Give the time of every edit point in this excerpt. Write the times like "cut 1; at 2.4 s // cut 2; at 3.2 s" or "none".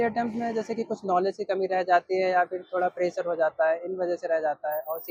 none